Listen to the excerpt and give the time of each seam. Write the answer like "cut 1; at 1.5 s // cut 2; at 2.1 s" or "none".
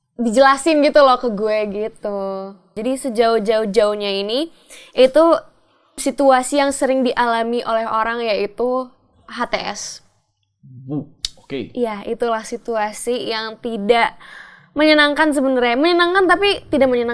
cut 1; at 2.7 s // cut 2; at 6.0 s